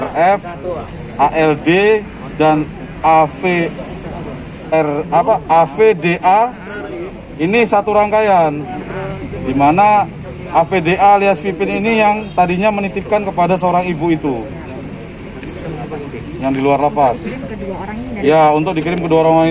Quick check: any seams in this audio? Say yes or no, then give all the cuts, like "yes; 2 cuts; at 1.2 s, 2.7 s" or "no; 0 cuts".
no; 0 cuts